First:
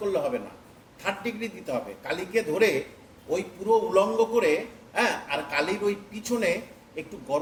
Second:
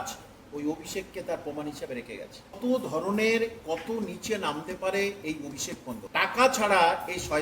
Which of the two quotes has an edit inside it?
second; 2 cuts; at 2.6 s, 6.0 s

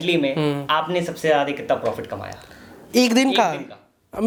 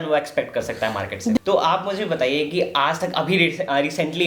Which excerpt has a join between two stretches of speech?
second; 1 cut; at 1.4 s

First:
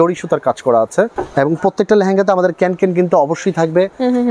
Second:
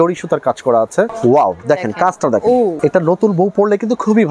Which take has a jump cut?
second; 2 cuts; at 1.1 s, 2.8 s

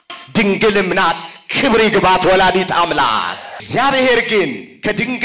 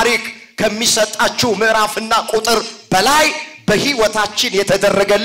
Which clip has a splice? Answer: first; 1 cut; at 3.6 s

